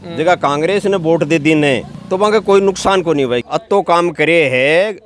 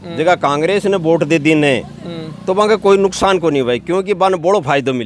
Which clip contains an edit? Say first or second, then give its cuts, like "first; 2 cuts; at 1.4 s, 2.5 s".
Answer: first; 2 cuts; at 2.0 s, 3.4 s